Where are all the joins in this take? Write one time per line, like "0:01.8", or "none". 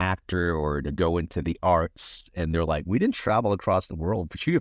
none